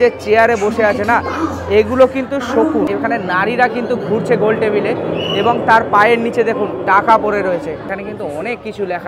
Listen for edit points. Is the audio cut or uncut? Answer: cut